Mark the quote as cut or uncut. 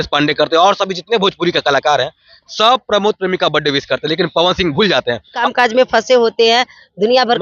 cut